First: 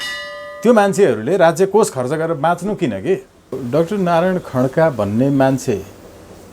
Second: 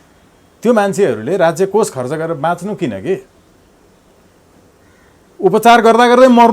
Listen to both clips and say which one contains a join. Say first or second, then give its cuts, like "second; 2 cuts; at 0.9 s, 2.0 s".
first; 1 cut; at 3.6 s